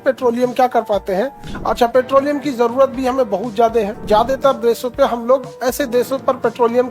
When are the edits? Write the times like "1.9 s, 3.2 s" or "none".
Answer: 1.4 s, 4.0 s, 5.5 s